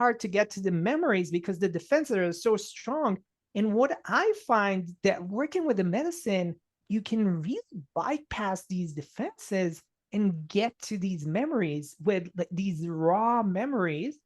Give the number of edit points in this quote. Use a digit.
1